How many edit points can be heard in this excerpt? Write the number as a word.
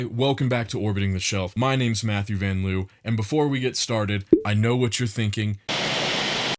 one